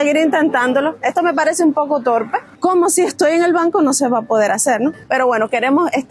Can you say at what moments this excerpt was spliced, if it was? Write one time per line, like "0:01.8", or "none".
0:02.4
0:05.0